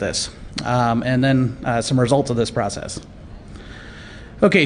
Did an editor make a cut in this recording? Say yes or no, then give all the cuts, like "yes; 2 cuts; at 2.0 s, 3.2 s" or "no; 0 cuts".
no; 0 cuts